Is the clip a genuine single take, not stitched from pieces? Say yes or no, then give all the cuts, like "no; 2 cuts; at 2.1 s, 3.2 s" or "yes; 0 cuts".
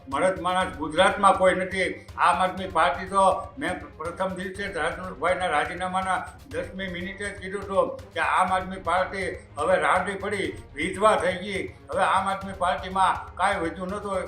yes; 0 cuts